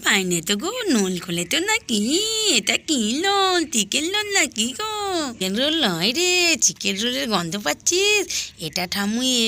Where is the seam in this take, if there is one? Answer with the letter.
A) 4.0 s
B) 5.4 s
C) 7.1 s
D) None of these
B